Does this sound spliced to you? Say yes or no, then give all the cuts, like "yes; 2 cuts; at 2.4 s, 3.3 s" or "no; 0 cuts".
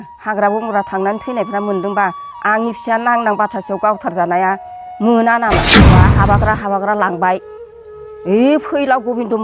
yes; 1 cut; at 5.8 s